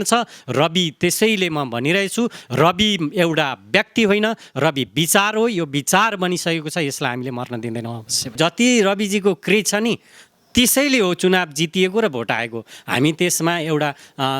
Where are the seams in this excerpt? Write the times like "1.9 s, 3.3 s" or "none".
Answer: 8.3 s